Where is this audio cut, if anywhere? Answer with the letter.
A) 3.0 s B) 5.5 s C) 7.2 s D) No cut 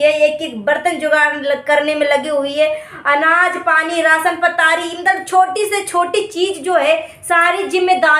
D